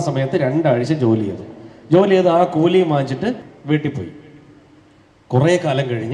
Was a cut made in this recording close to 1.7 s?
no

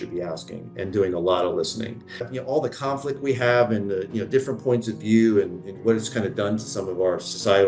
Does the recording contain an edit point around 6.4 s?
no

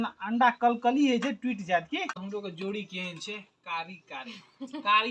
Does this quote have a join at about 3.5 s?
no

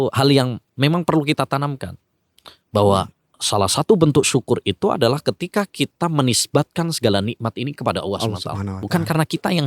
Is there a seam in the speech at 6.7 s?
no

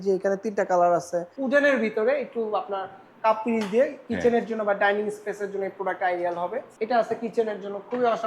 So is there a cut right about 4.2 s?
no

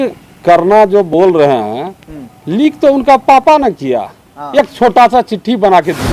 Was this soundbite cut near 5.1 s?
no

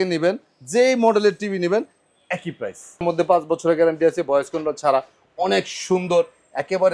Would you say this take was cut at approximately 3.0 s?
yes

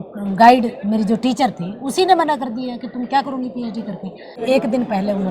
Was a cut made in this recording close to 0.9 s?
no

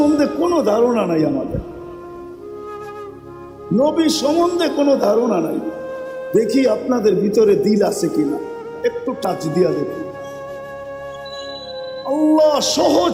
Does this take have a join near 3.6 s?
no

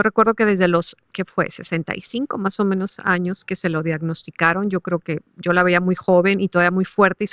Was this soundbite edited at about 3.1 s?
no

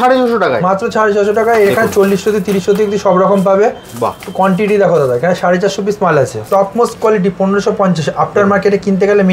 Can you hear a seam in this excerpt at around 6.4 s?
yes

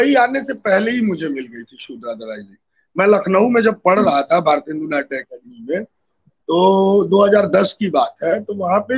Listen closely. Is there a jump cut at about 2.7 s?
no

